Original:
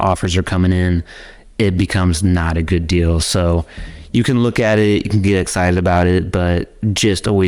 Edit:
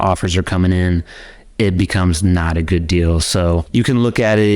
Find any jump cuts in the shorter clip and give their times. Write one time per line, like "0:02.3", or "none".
0:03.7